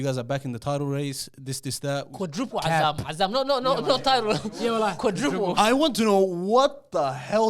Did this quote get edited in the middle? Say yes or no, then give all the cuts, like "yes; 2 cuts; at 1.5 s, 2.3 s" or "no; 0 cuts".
yes; 1 cut; at 5.5 s